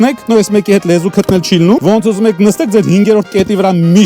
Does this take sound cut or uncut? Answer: cut